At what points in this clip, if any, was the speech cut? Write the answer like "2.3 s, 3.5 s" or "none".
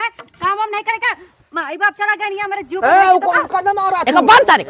none

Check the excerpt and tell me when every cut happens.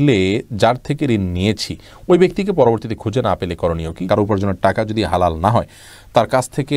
4.0 s

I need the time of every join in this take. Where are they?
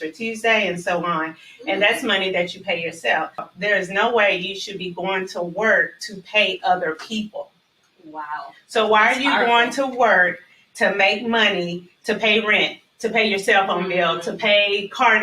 3.5 s

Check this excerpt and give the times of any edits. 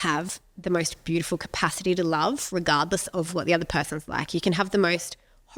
none

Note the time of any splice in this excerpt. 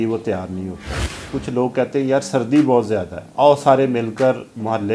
1.2 s, 3.2 s

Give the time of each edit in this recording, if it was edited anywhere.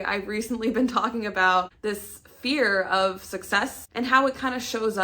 1.7 s, 3.9 s

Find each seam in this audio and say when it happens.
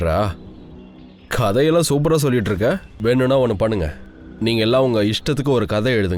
none

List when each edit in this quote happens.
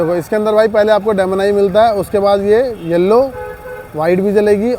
none

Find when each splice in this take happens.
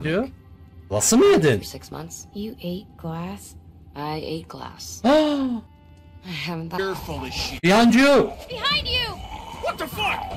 6.8 s

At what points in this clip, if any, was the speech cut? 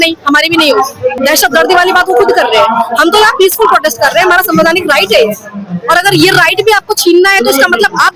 1.2 s

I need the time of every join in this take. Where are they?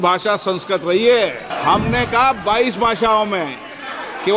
1.5 s

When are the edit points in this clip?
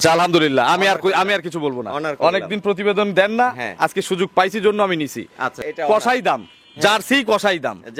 5.6 s

